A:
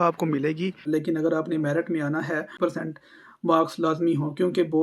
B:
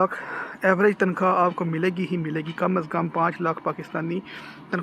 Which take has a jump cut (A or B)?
A